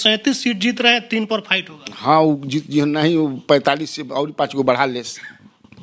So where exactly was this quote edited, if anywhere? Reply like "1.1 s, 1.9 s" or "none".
none